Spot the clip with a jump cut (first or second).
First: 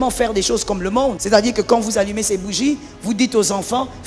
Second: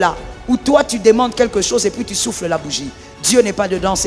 first